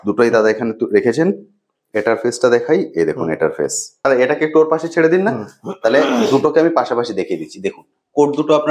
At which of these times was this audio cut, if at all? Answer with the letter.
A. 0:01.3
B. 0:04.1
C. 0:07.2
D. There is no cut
B